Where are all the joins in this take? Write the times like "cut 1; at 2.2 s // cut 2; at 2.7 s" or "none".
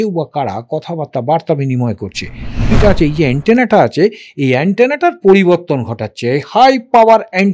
cut 1; at 2.7 s